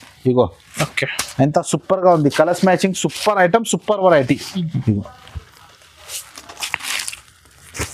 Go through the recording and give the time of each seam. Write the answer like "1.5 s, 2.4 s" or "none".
none